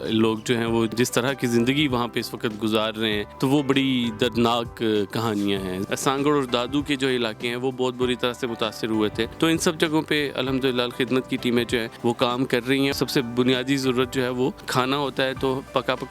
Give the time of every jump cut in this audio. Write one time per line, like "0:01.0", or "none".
0:00.9
0:03.3
0:05.8
0:09.3
0:11.9
0:12.9
0:14.6